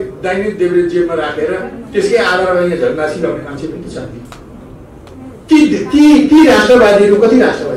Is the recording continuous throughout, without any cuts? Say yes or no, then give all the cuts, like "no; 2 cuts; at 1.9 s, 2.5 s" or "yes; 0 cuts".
yes; 0 cuts